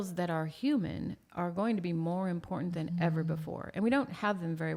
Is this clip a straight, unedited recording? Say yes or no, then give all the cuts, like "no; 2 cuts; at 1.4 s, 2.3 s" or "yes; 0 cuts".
yes; 0 cuts